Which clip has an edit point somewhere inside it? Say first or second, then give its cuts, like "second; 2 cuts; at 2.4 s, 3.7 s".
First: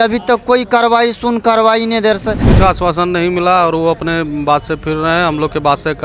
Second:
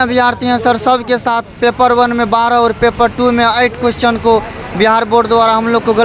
first; 1 cut; at 2.4 s